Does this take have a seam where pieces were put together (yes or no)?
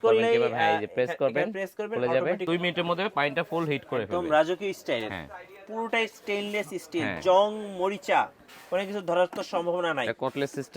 yes